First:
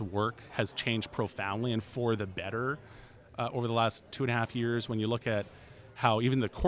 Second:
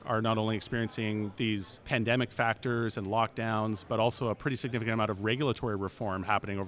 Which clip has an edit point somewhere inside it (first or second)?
second